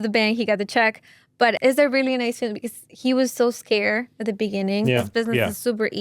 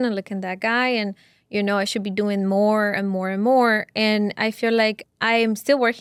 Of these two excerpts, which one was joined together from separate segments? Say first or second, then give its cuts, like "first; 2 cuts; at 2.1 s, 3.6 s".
first; 2 cuts; at 1.6 s, 5.1 s